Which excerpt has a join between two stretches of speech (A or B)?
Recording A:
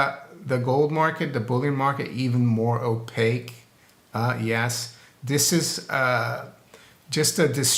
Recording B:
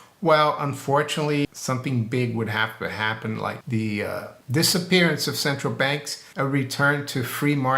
B